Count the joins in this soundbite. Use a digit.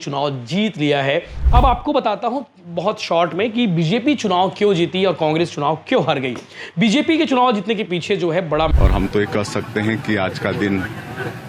2